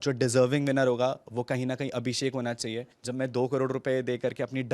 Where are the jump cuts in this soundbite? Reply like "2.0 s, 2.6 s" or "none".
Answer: 2.9 s